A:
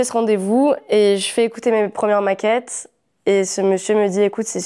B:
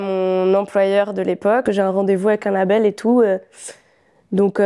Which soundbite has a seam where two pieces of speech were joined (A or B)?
B